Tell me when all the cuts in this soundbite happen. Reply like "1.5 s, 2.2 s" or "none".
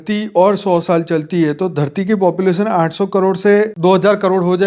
3.7 s